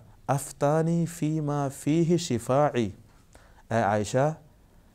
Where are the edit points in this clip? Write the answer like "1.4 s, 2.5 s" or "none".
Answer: none